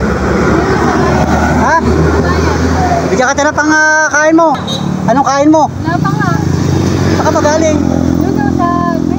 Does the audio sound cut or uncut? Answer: cut